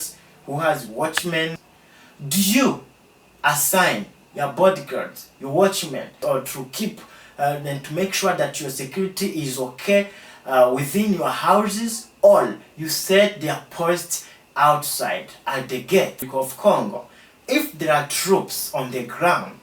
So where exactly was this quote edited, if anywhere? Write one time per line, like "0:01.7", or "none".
0:01.6
0:06.1
0:16.2